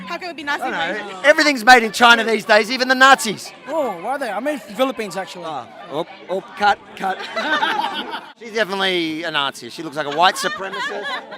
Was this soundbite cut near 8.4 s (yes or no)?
yes